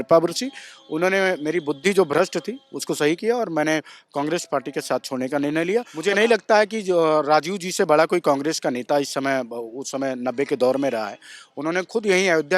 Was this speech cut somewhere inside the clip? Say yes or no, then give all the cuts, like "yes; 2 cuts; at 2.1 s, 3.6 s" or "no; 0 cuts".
yes; 1 cut; at 5.9 s